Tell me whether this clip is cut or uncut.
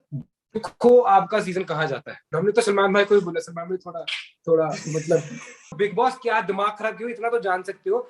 cut